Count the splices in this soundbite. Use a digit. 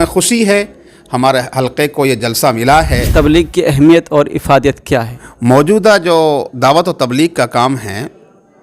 1